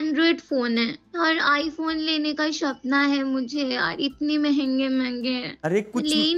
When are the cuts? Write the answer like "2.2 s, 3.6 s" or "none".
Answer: 1.0 s